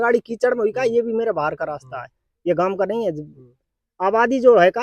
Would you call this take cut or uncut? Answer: uncut